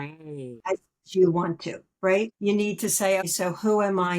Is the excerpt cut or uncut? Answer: cut